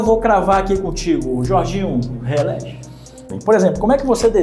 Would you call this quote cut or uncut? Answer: cut